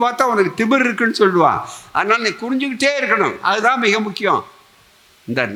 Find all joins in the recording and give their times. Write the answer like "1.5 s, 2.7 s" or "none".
none